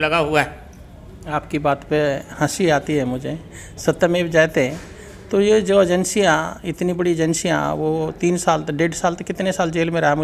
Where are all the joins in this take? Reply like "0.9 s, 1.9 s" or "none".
none

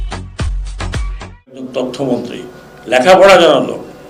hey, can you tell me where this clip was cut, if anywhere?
1.7 s

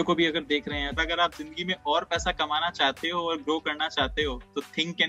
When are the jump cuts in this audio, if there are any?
1.0 s

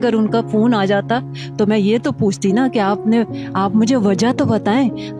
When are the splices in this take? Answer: none

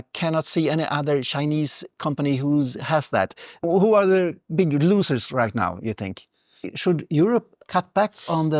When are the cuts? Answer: 3.6 s, 6.7 s

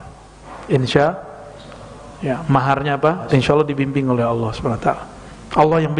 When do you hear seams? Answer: 3.2 s

